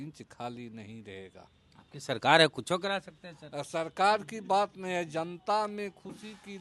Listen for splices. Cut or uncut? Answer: uncut